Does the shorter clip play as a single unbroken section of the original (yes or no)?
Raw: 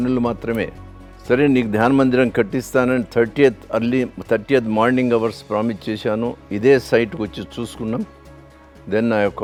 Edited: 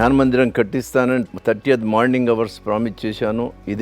no